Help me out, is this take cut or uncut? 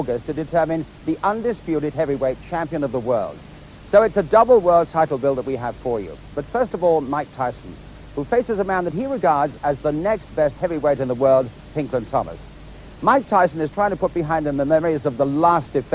cut